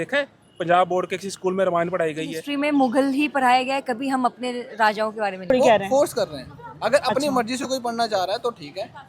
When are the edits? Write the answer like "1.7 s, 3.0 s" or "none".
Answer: 2.4 s, 5.5 s